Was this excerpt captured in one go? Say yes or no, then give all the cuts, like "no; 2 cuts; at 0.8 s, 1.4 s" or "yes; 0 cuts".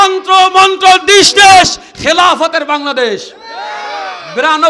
yes; 0 cuts